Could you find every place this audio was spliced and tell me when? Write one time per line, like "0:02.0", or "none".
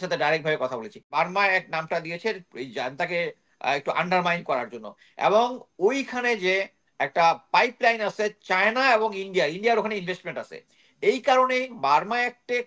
0:01.1